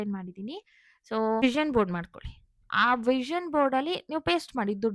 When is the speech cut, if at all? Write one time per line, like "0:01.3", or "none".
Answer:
0:01.4